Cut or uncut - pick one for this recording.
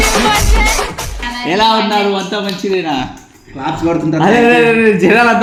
uncut